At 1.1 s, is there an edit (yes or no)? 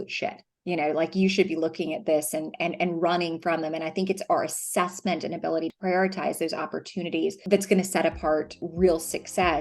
no